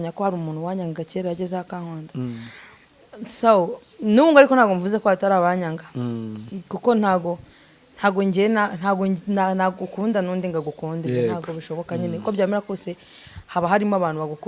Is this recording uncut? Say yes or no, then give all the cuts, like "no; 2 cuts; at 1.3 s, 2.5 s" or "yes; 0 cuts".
yes; 0 cuts